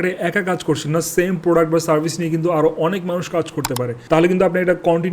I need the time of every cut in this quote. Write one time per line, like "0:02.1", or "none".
0:04.0